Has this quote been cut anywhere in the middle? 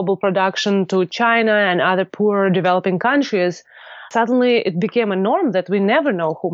no; 0 cuts

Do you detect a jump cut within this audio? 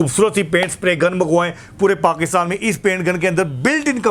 no; 0 cuts

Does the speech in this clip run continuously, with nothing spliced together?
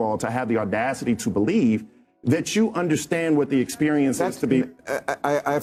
yes; 0 cuts

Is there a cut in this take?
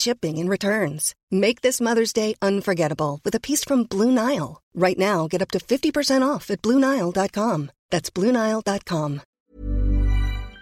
yes; 1 cut; at 9.3 s

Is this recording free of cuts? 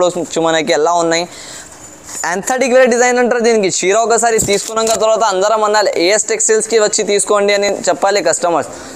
yes; 0 cuts

